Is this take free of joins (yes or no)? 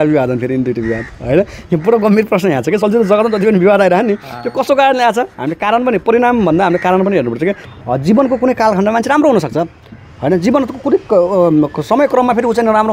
no